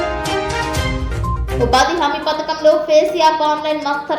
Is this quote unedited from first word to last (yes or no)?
no